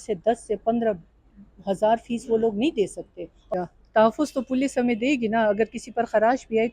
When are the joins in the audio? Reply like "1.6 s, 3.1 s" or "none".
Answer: 3.5 s